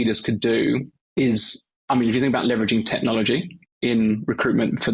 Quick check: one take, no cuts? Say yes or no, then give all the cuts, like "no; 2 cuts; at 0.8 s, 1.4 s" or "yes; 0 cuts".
no; 1 cut; at 1.0 s